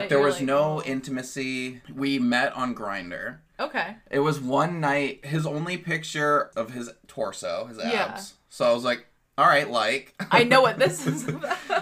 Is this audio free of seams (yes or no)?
no